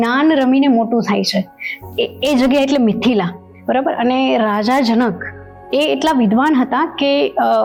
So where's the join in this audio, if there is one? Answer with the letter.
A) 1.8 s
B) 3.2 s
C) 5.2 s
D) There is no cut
D